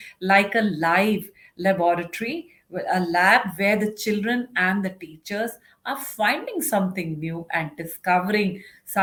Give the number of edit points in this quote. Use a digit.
0